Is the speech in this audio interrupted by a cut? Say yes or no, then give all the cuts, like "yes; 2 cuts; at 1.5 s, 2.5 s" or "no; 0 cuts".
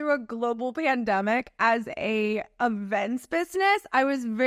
no; 0 cuts